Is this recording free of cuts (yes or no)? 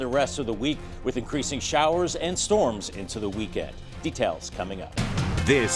no